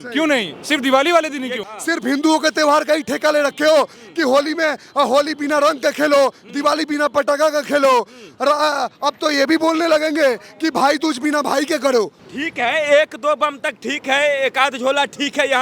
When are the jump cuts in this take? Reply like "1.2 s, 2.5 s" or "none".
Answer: 1.7 s, 12.2 s